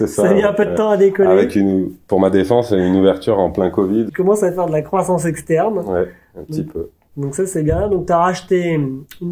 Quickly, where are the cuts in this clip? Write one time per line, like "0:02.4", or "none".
0:04.1